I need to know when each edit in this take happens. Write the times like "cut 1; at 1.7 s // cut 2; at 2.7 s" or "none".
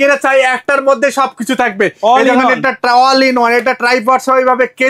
none